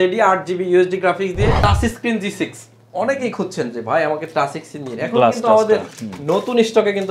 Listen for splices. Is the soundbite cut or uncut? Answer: cut